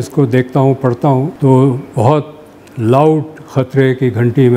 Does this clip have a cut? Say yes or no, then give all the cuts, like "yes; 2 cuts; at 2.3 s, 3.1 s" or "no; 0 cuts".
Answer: yes; 1 cut; at 1.3 s